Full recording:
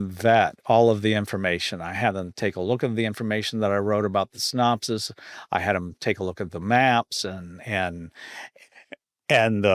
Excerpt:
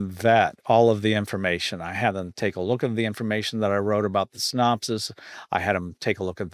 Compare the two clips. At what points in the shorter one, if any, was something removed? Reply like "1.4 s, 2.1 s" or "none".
none